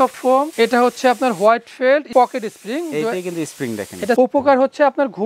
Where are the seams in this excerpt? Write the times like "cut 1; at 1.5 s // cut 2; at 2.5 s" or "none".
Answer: cut 1; at 2.1 s // cut 2; at 4.2 s